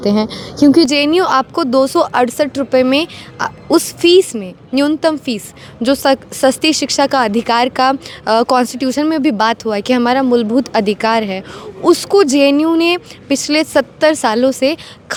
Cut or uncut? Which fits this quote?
uncut